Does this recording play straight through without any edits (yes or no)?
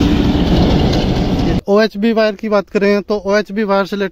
no